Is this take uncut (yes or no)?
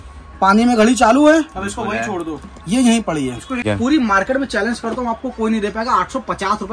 no